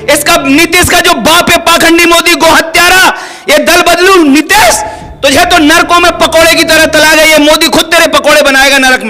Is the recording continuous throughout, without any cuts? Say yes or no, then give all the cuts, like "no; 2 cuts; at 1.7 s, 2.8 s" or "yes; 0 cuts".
yes; 0 cuts